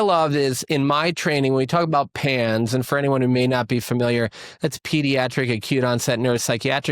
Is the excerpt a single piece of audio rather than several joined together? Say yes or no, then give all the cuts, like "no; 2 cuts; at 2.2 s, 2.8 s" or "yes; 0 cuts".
yes; 0 cuts